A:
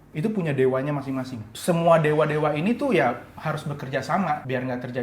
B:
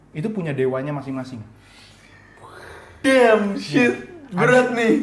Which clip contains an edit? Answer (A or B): A